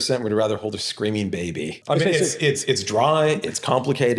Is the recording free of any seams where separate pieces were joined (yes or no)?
no